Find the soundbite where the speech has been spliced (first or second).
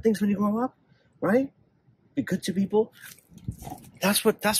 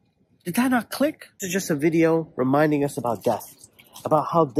second